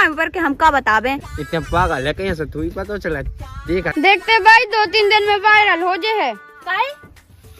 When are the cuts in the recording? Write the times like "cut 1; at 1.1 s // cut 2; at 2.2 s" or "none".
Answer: cut 1; at 3.9 s